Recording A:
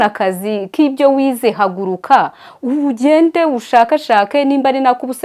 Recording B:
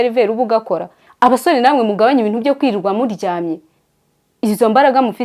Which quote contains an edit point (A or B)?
B